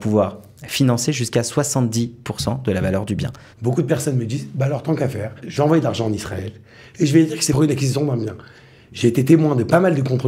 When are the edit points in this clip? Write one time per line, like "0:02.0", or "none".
0:03.5
0:05.4
0:07.5